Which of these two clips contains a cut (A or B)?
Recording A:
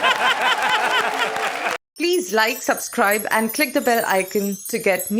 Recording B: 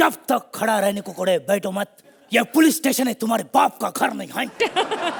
A